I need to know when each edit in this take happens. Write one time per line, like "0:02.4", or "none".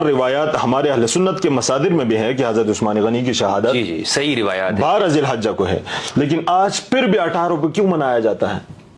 none